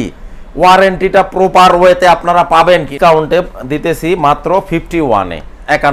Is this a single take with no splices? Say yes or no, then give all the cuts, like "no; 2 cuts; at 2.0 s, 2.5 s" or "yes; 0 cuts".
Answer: no; 1 cut; at 2.9 s